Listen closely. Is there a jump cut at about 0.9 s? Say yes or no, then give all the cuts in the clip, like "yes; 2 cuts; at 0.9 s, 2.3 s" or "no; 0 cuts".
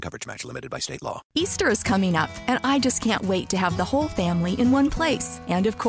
yes; 1 cut; at 0.9 s